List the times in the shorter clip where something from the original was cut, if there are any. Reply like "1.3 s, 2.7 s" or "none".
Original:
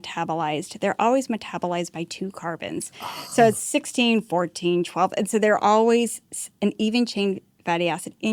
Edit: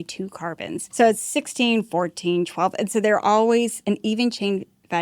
0.9 s, 3.8 s